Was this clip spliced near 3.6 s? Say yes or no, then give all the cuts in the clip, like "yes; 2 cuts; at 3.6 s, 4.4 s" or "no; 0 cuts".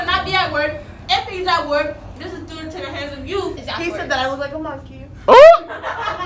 yes; 1 cut; at 3.6 s